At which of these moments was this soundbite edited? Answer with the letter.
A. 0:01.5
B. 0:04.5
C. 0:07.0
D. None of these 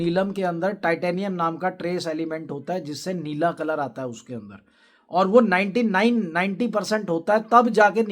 D